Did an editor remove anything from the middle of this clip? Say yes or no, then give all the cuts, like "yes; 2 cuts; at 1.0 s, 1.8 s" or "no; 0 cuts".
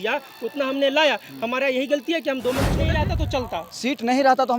yes; 1 cut; at 2.9 s